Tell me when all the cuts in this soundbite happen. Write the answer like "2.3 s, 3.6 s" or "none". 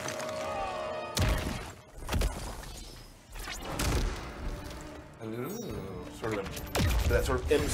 none